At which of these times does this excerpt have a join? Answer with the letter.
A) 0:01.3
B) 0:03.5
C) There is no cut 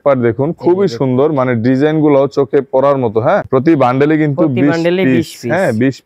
B